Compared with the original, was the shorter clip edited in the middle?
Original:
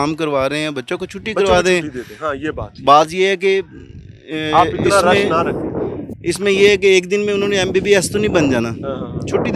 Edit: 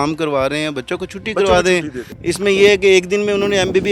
yes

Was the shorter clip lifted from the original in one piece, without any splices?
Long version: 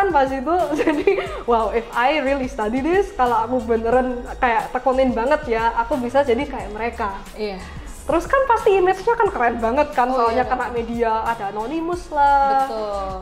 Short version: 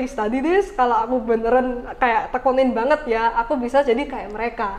yes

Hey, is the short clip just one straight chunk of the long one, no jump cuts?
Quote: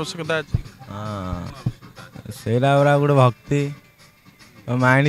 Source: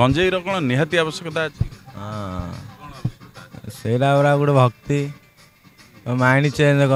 no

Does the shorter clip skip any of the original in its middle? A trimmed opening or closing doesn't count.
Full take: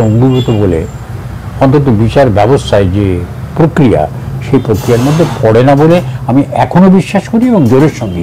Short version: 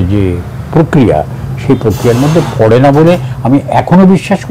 no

